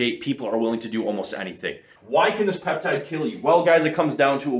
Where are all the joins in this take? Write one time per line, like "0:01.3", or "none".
0:01.9

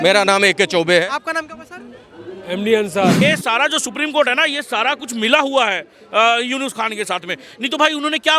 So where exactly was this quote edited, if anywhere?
0:03.2

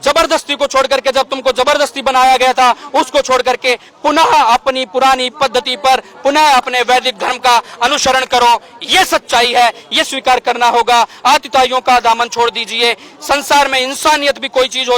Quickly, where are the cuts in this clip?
none

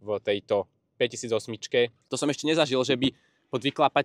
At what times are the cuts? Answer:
0:02.0

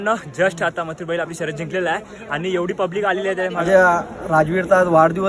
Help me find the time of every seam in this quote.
0:03.6

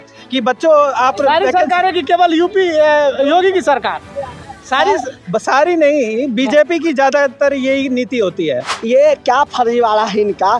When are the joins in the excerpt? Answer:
0:08.7

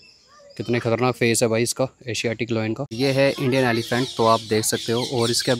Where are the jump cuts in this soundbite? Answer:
0:02.9

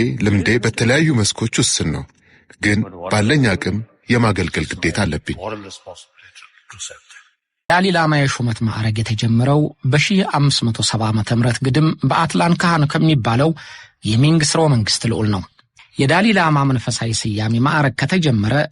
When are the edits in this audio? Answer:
0:07.7

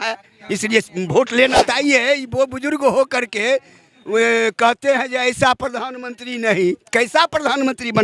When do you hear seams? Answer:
0:01.7

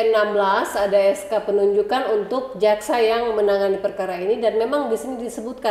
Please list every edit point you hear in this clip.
none

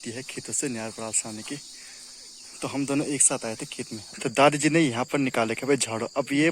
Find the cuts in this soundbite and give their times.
0:04.2

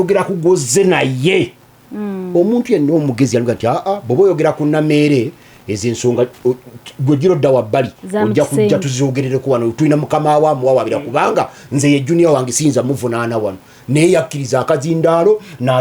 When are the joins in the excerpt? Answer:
none

